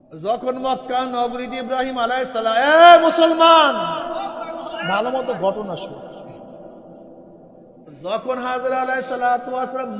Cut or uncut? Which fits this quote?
uncut